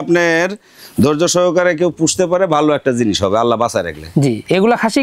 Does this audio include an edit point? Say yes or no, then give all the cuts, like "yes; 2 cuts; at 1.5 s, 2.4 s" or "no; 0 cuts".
no; 0 cuts